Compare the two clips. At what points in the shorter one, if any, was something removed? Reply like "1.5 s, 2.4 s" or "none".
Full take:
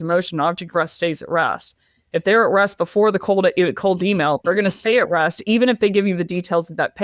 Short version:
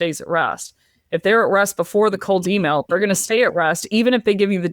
2.2 s